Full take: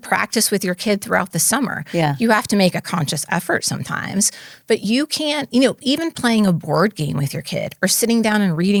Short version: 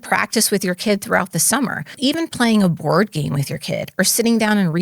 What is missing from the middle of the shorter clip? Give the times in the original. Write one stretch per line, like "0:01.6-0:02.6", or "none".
0:01.9-0:05.7